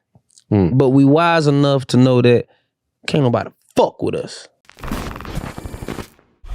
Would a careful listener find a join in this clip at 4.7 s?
yes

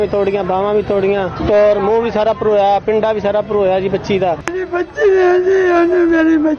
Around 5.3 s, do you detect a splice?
no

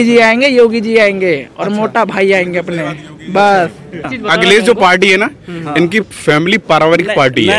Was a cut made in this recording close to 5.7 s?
no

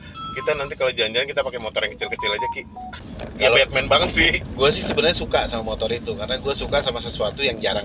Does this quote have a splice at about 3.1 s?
yes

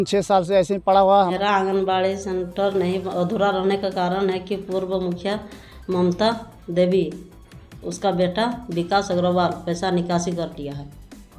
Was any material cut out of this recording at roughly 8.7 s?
no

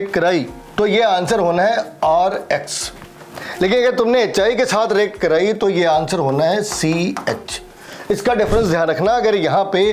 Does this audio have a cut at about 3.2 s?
no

